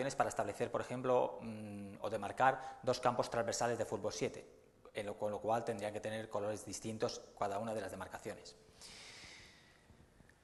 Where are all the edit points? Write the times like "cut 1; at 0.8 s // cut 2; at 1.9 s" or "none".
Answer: none